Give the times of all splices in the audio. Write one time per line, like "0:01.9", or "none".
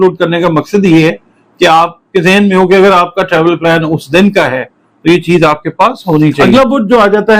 0:06.4

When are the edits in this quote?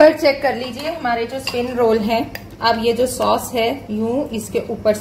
none

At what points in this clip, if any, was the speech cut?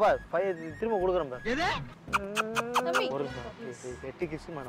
0:03.1

